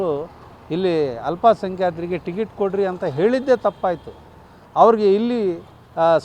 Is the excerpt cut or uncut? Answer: uncut